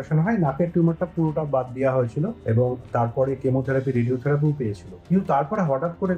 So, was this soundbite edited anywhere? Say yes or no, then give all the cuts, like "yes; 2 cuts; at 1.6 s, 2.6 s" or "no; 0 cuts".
no; 0 cuts